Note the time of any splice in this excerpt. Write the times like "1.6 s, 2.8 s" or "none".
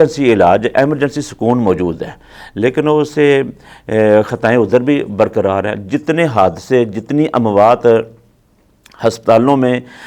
none